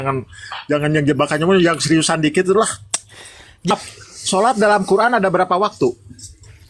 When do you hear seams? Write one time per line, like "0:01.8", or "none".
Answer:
0:03.7